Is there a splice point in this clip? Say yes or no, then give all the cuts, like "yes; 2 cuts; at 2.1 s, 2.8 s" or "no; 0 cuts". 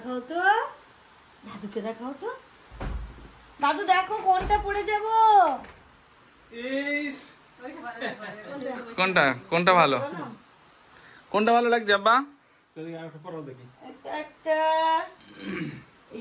no; 0 cuts